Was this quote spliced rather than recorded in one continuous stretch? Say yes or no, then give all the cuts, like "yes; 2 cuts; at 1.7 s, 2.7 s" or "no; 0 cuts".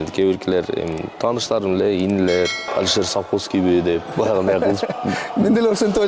yes; 1 cut; at 2.6 s